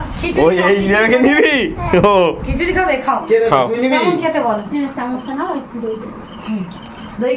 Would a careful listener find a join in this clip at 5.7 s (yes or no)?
no